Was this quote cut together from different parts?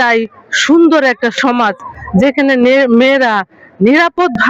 no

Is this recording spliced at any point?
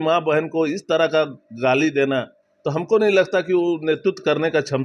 no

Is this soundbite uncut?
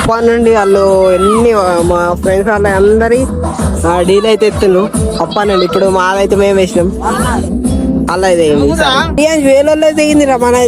no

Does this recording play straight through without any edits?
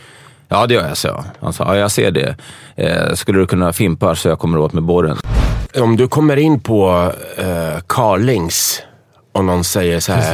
no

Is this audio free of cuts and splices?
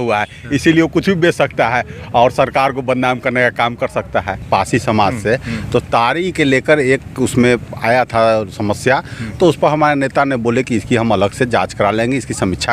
no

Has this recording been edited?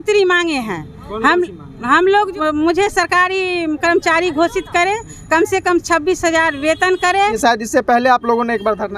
yes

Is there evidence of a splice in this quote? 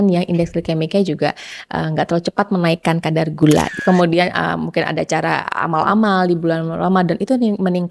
yes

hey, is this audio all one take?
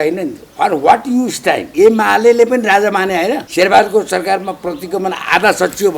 no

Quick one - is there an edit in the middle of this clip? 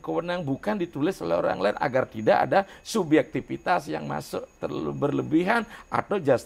no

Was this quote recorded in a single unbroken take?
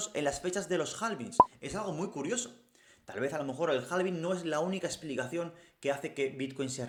yes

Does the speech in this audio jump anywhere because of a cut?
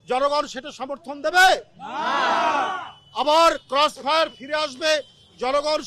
no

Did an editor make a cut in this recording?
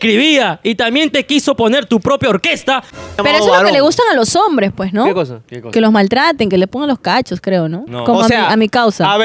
yes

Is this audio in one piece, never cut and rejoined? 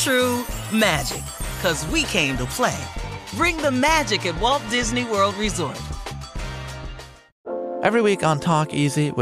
no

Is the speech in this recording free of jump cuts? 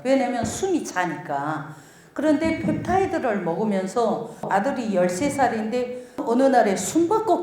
no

